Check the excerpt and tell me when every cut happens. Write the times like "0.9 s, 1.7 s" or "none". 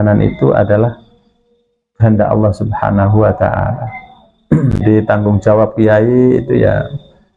4.8 s